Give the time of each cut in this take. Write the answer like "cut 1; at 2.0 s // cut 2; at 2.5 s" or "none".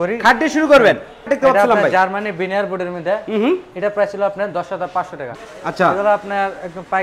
cut 1; at 1.3 s // cut 2; at 5.2 s